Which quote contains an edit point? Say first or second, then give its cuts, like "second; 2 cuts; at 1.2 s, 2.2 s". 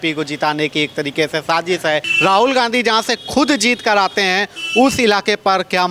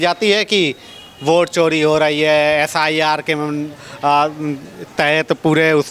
first; 1 cut; at 2.1 s